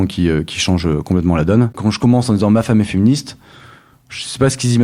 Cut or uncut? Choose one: cut